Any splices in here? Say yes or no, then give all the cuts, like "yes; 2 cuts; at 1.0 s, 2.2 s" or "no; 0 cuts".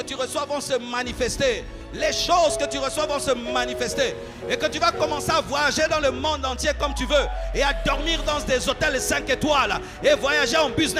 no; 0 cuts